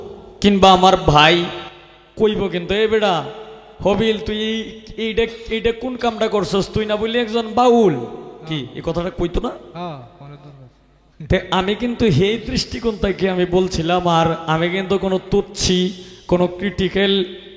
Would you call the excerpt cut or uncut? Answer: uncut